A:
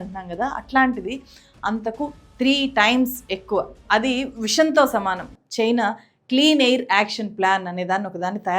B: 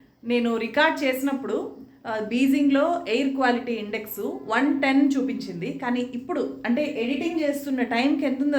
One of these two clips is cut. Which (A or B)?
A